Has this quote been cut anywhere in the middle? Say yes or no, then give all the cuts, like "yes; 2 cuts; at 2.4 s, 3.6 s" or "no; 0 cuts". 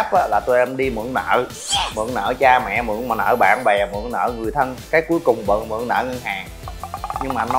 yes; 1 cut; at 1.9 s